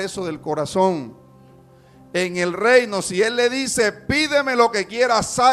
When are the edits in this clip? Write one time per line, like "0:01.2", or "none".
none